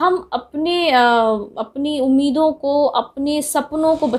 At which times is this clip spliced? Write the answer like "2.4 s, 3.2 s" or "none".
none